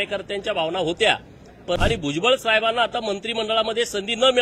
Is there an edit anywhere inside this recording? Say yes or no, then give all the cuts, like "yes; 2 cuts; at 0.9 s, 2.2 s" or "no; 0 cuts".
yes; 1 cut; at 1.8 s